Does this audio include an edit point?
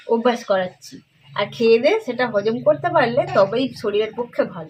no; 0 cuts

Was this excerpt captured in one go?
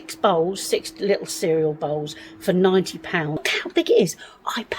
no; 1 cut; at 3.5 s

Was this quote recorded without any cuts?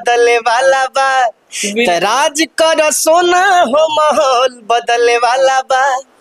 yes; 0 cuts

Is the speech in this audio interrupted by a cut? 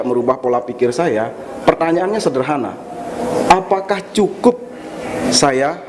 no; 0 cuts

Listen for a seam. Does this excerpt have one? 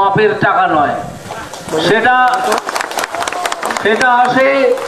yes; 1 cut; at 1.1 s

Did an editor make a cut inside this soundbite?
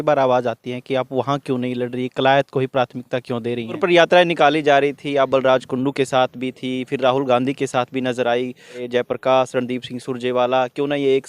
yes; 2 cuts; at 3.8 s, 8.8 s

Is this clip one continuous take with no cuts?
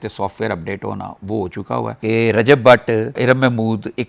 no; 1 cut; at 2.0 s

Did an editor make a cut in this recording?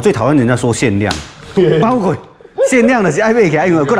no; 0 cuts

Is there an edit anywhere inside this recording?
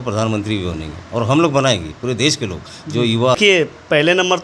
yes; 1 cut; at 3.4 s

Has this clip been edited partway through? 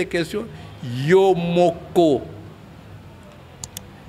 no; 0 cuts

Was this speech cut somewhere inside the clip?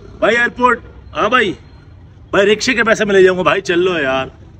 no; 0 cuts

